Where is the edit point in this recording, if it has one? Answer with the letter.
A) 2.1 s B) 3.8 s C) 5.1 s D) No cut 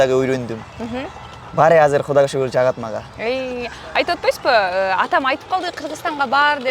D